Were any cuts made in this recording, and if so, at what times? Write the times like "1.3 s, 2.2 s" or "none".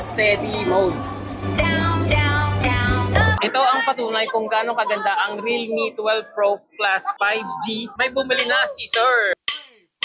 3.4 s